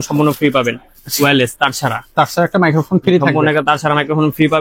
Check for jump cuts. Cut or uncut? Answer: uncut